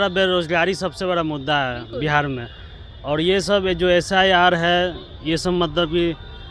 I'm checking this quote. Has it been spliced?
no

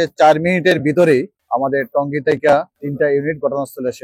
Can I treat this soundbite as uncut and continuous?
no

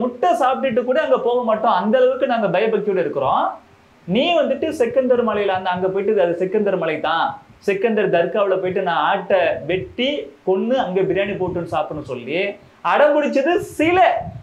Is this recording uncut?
yes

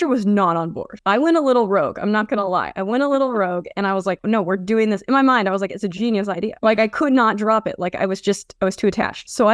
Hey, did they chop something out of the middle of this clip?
no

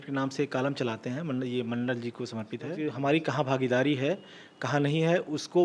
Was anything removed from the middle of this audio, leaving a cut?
yes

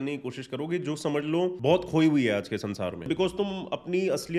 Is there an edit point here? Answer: yes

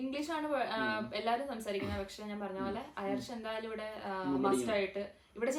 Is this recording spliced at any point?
no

